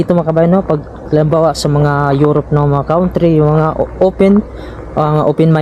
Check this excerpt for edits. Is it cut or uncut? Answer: uncut